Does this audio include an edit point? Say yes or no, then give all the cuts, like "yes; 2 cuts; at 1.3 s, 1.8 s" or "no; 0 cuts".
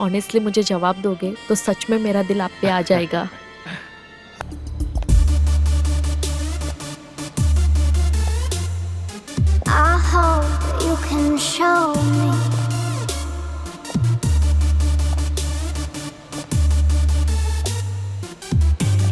yes; 1 cut; at 4.4 s